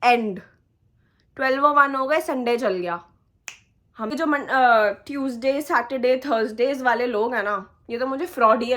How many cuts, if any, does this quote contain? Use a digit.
1